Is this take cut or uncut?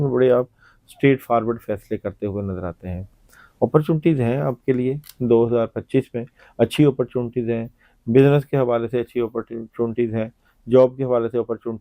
uncut